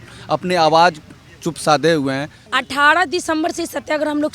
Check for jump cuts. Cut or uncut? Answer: cut